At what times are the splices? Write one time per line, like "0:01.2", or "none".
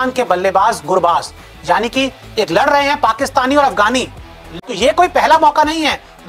0:04.5